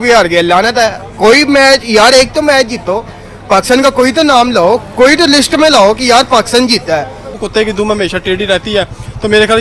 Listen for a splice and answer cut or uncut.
cut